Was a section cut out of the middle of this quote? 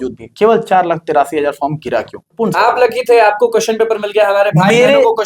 yes; 1 cut; at 2.2 s

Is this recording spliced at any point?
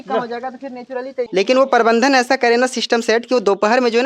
yes; 1 cut; at 1.3 s

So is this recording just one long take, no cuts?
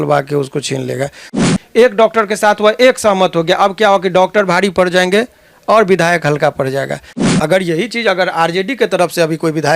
no; 2 cuts; at 1.3 s, 7.1 s

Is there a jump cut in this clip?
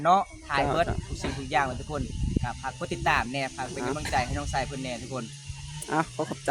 no; 0 cuts

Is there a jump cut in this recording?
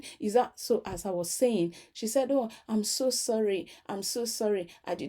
no; 0 cuts

